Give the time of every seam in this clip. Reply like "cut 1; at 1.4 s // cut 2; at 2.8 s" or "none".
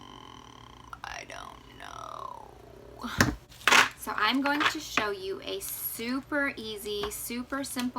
cut 1; at 3.5 s